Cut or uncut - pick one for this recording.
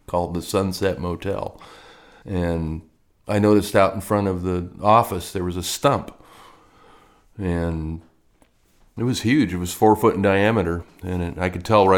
uncut